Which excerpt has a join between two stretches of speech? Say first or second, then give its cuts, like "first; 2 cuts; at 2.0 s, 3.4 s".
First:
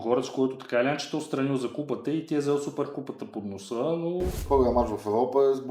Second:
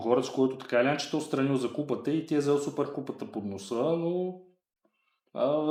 first; 1 cut; at 4.4 s